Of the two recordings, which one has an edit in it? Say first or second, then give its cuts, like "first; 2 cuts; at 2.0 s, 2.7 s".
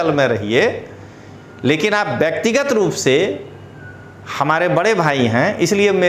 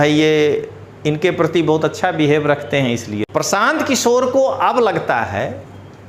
second; 1 cut; at 3.1 s